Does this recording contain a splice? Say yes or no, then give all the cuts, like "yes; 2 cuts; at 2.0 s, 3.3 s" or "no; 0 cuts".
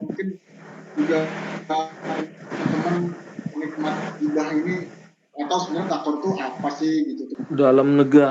yes; 1 cut; at 7.3 s